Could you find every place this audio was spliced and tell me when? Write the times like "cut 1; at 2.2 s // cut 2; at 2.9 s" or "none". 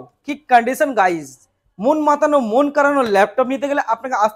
none